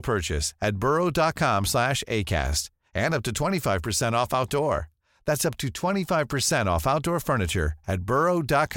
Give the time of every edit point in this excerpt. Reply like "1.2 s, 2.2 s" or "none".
none